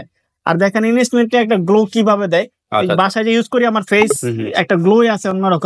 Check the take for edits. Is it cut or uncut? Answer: uncut